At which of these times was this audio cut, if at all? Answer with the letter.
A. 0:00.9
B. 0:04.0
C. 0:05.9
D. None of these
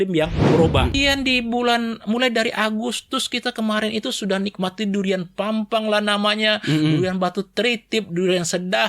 A